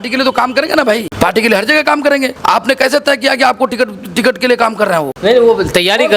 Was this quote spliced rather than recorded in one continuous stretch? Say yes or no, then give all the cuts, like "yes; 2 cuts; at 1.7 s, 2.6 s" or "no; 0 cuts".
yes; 3 cuts; at 1.1 s, 2.3 s, 5.1 s